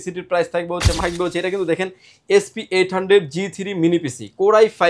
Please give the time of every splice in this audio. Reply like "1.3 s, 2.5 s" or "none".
1.0 s